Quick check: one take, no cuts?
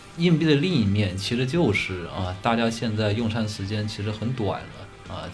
yes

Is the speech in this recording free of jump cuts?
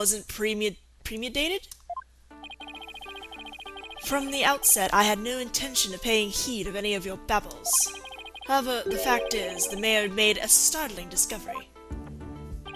yes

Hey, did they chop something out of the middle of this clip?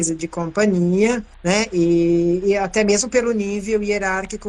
yes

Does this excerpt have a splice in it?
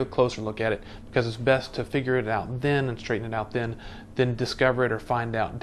no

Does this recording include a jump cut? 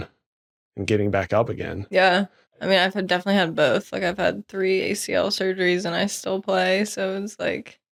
no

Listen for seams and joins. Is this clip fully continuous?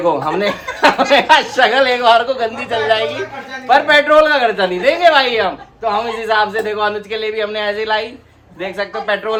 yes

